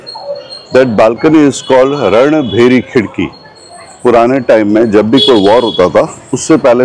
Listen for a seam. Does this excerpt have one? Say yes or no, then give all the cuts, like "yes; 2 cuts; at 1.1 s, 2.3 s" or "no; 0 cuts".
no; 0 cuts